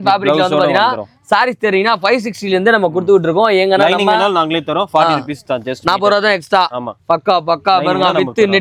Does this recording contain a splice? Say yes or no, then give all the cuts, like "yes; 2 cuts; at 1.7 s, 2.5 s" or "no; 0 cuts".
no; 0 cuts